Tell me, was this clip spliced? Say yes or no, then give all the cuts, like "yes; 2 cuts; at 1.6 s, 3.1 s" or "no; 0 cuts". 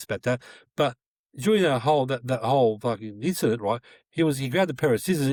no; 0 cuts